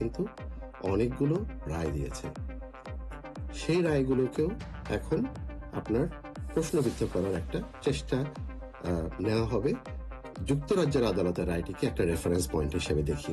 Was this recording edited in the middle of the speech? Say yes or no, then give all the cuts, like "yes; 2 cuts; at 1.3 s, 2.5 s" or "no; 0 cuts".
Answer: no; 0 cuts